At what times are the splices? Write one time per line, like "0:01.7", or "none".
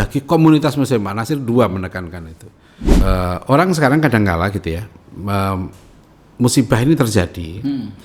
0:03.0